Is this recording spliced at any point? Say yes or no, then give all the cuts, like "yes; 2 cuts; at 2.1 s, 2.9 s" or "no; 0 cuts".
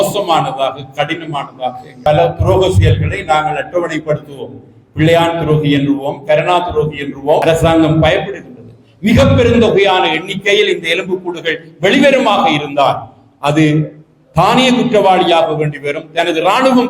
yes; 2 cuts; at 2.0 s, 7.4 s